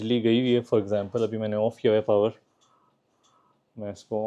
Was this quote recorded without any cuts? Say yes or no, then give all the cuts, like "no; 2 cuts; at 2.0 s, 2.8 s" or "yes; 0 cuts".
yes; 0 cuts